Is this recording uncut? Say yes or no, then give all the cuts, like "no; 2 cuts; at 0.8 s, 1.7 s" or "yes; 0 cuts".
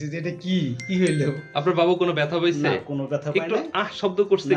no; 1 cut; at 1.4 s